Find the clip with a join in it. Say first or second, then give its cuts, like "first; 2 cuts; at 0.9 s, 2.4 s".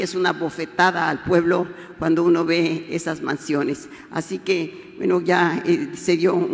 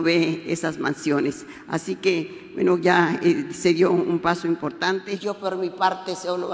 second; 1 cut; at 5.1 s